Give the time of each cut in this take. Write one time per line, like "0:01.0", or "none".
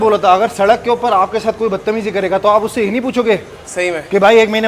none